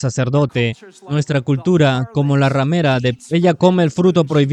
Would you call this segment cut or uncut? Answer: uncut